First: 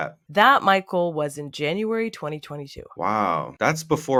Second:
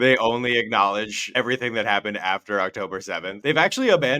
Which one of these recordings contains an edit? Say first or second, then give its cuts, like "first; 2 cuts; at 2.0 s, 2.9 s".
second; 2 cuts; at 1.2 s, 3.4 s